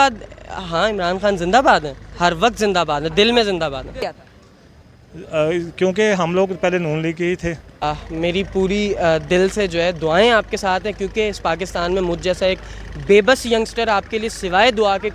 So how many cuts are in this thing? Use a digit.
2